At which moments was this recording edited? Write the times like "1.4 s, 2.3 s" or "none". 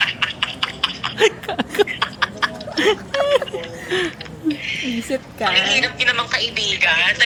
none